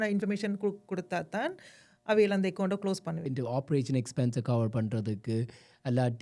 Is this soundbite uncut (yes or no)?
no